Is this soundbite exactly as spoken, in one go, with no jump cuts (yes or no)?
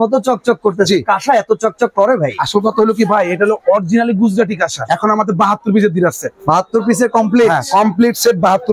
no